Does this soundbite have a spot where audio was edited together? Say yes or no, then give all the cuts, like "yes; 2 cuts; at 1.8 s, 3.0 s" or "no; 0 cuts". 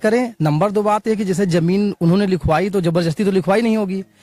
no; 0 cuts